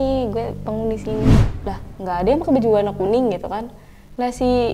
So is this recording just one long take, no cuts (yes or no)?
no